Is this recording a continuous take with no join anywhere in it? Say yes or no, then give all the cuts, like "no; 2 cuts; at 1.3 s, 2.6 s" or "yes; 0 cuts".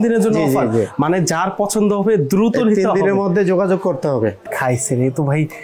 no; 1 cut; at 4.4 s